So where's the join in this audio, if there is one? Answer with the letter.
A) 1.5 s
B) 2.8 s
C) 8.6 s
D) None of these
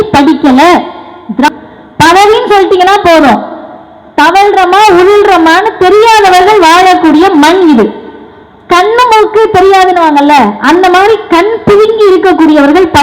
A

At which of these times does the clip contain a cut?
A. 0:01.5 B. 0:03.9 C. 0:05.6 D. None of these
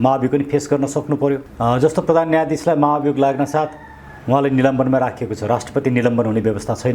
A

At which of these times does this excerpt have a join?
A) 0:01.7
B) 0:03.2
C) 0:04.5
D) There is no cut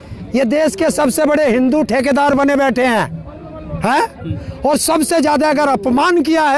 D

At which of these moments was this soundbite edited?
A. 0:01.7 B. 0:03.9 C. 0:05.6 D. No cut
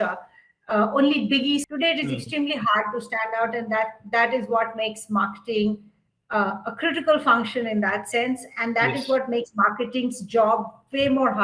A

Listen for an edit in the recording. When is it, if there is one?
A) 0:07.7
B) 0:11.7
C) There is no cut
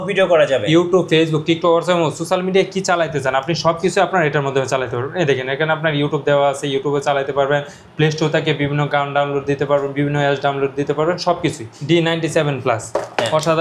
B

